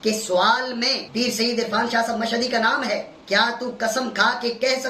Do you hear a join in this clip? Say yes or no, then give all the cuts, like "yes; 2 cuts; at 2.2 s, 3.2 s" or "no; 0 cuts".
no; 0 cuts